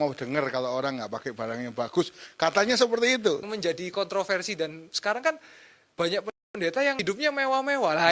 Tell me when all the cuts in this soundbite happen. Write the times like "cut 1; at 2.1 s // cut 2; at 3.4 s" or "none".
cut 1; at 3.4 s // cut 2; at 7.0 s